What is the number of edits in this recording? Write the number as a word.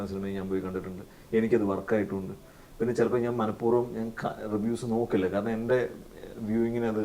zero